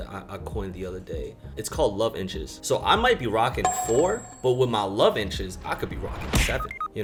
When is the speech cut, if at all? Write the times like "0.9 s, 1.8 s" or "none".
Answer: none